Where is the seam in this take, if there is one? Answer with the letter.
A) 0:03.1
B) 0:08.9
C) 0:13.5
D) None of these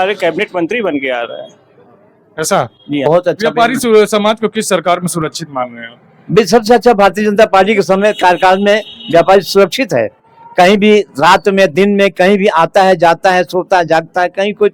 A